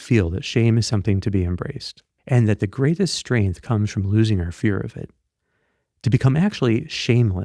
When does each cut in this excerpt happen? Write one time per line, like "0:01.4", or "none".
0:02.1

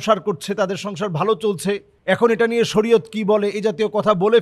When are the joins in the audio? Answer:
0:01.9

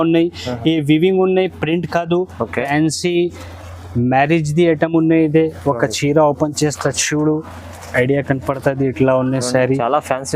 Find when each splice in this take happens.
0:02.7

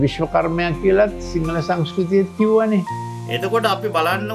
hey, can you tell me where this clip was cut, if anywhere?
0:02.9

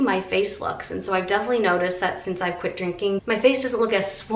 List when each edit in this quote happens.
0:03.2

